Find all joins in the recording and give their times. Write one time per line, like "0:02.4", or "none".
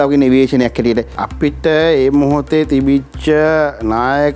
0:01.2